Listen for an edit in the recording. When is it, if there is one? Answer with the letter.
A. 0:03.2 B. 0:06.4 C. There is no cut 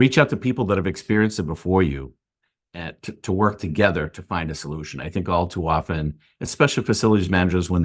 C